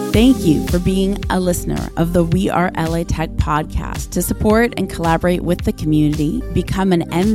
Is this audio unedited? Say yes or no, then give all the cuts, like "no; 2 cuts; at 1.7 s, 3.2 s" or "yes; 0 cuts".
yes; 0 cuts